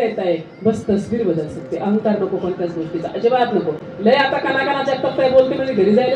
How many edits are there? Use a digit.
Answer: 0